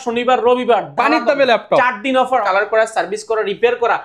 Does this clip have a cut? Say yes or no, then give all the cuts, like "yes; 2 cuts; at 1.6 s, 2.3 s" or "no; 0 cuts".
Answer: yes; 1 cut; at 2.4 s